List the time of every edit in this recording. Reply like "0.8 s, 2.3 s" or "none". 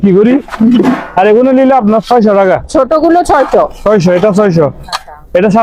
none